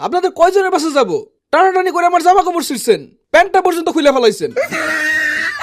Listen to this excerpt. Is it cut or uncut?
cut